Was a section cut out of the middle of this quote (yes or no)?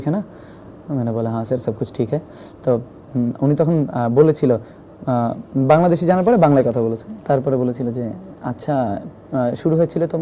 no